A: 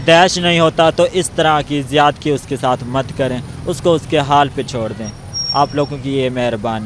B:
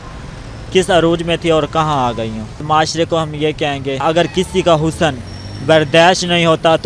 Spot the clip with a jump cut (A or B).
B